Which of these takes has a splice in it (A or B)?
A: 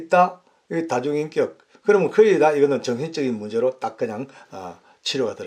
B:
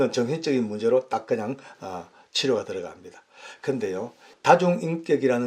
B